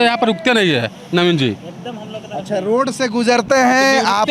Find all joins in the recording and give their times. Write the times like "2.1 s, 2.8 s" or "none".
none

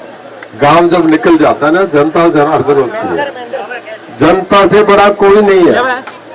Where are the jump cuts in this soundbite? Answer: none

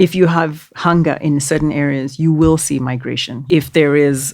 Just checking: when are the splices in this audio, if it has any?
3.3 s

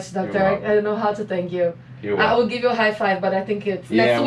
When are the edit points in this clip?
none

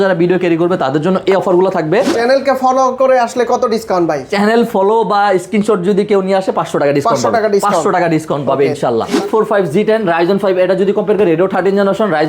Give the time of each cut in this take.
2.1 s, 9.2 s

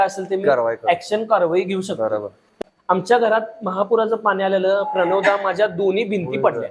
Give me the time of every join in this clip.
2.5 s

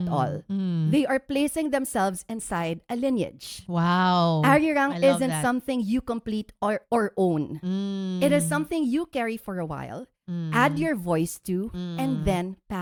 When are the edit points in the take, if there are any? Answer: none

